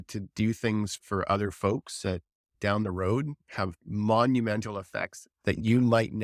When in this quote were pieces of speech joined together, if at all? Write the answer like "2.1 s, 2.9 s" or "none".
1.0 s, 2.5 s